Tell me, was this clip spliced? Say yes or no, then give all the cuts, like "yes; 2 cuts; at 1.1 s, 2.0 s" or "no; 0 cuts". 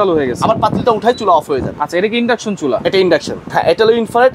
yes; 1 cut; at 3.4 s